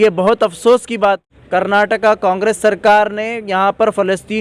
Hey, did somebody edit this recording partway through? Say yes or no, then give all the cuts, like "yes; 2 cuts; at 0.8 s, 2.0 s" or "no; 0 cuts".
yes; 1 cut; at 1.2 s